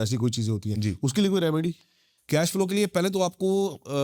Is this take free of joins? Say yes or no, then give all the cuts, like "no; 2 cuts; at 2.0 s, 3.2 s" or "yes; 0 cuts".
yes; 0 cuts